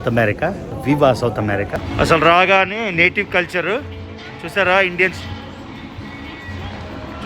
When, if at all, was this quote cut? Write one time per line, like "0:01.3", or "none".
0:01.7